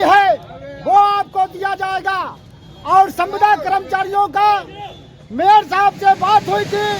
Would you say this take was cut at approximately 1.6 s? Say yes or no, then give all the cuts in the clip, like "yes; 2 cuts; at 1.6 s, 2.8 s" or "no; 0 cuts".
yes; 1 cut; at 1.6 s